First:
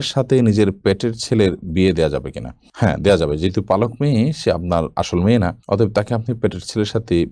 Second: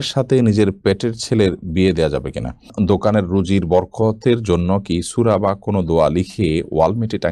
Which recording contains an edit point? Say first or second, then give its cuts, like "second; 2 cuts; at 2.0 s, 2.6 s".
second; 1 cut; at 2.7 s